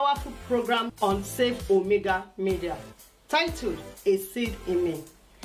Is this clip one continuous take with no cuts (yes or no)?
yes